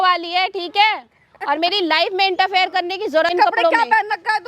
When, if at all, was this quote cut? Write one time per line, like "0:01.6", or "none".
0:03.3